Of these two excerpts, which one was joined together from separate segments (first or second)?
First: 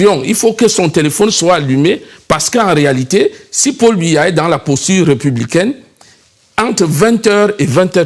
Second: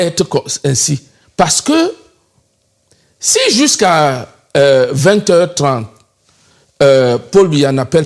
first